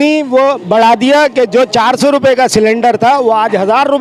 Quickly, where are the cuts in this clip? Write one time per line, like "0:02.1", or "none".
none